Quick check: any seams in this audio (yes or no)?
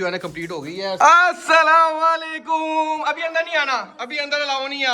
yes